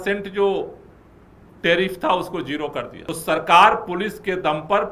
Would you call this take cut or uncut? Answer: cut